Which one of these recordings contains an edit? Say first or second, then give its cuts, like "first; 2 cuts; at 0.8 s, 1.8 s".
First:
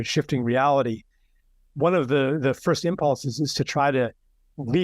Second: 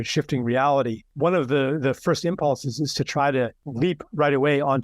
second; 2 cuts; at 1.0 s, 3.6 s